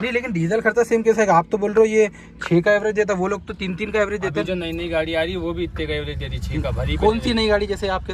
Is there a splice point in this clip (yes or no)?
no